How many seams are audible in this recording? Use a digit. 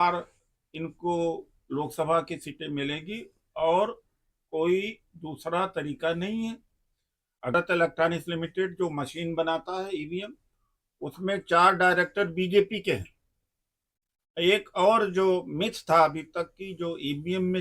1